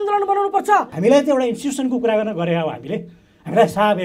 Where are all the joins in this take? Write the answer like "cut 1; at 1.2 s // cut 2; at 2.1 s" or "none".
cut 1; at 0.9 s